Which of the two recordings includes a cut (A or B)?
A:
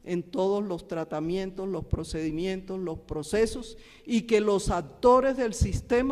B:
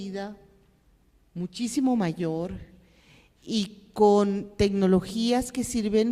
B